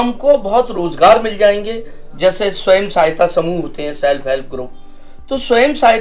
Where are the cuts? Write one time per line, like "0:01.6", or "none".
none

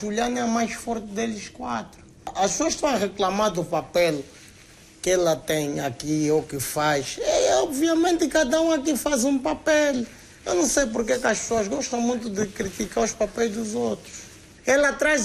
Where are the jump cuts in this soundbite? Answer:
0:10.1

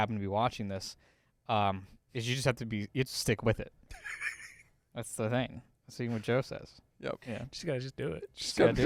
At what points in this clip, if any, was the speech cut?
none

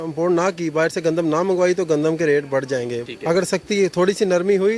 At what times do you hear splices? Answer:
0:03.0

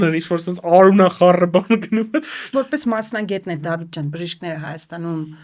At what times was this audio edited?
0:02.4

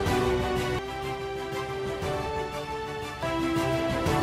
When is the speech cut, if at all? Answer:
none

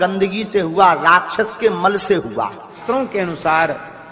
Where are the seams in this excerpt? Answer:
0:02.8

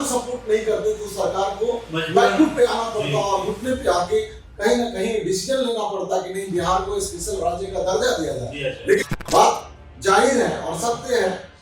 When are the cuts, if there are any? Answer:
0:09.1

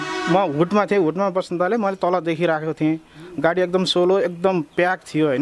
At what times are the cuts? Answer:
none

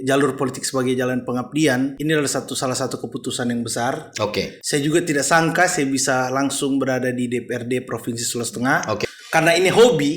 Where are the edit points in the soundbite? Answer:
0:02.0
0:04.6
0:09.0

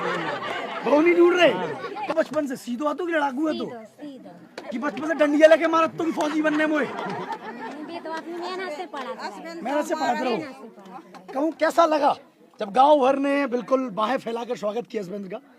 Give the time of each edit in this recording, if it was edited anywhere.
0:02.1
0:11.5

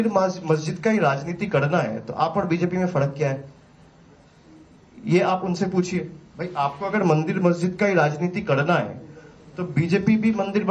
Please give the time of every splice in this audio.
0:05.0

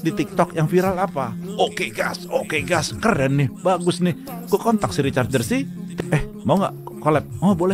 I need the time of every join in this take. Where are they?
0:05.8

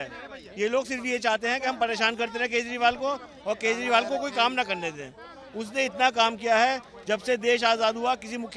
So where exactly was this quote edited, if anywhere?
none

